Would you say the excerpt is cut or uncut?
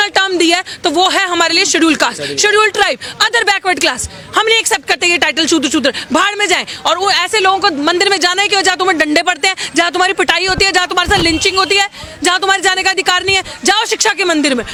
uncut